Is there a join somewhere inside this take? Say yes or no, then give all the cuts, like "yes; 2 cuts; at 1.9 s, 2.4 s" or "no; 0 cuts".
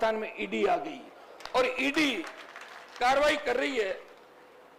no; 0 cuts